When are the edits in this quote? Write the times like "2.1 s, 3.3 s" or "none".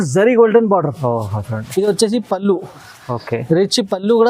1.6 s